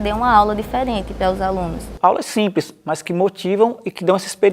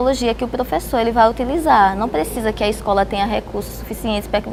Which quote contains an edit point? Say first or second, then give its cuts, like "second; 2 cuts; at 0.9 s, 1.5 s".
first; 1 cut; at 1.9 s